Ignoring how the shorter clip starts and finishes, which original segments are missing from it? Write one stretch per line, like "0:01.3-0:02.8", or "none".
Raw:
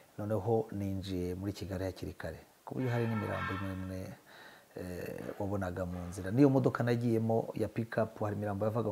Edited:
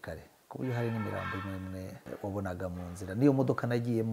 0:04.2-0:05.2